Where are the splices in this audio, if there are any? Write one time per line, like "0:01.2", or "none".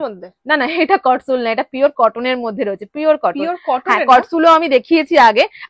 none